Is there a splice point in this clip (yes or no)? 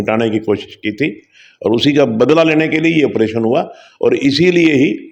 no